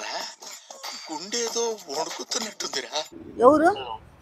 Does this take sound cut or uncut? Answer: cut